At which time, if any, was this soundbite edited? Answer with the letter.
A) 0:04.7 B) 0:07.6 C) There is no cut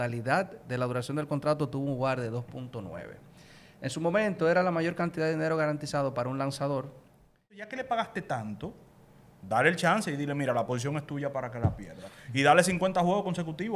B